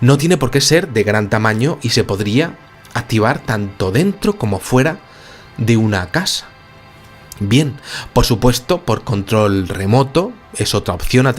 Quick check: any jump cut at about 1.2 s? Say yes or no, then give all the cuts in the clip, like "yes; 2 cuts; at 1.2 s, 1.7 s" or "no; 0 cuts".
yes; 1 cut; at 1.2 s